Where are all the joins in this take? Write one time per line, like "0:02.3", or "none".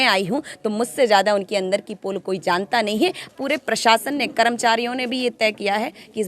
0:03.3